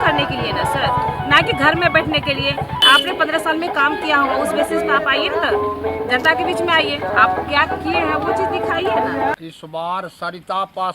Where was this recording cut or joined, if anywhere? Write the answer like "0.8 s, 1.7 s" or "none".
2.8 s, 9.4 s